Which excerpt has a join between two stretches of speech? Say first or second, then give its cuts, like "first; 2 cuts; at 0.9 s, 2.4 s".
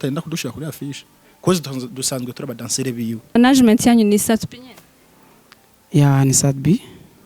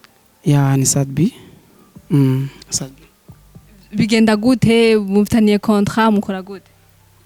first; 1 cut; at 3.4 s